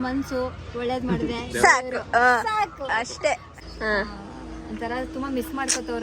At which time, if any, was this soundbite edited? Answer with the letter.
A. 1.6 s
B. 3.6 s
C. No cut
B